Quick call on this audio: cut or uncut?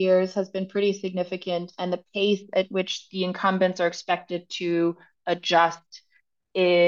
uncut